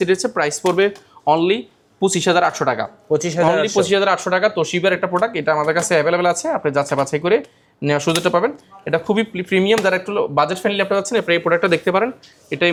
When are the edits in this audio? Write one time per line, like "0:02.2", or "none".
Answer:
none